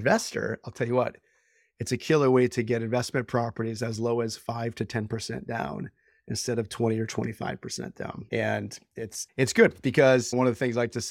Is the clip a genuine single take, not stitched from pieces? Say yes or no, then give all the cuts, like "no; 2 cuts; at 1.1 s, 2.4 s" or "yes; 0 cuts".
no; 3 cuts; at 8.2 s, 9.2 s, 10.3 s